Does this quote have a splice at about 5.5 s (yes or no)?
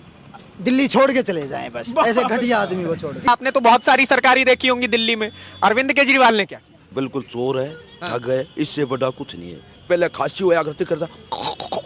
no